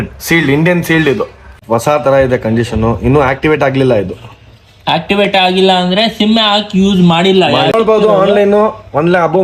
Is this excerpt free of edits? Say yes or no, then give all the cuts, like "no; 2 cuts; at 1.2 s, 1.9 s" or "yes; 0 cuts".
no; 2 cuts; at 1.6 s, 7.7 s